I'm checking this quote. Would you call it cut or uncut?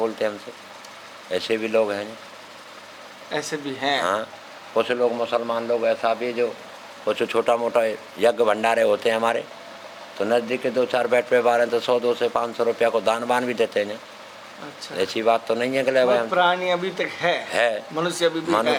uncut